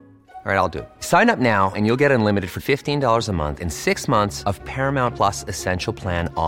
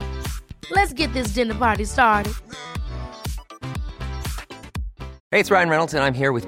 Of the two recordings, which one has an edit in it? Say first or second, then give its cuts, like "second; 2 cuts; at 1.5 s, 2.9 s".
second; 1 cut; at 5.1 s